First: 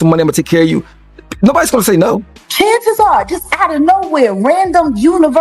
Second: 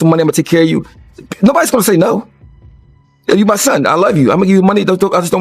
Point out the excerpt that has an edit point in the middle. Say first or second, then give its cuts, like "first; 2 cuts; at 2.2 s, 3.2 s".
first; 1 cut; at 2.4 s